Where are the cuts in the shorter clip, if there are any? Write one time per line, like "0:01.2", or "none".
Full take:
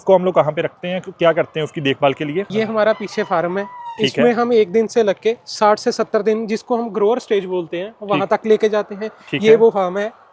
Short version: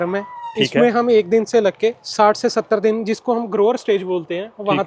none